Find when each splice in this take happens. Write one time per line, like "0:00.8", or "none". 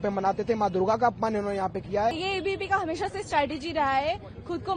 0:02.2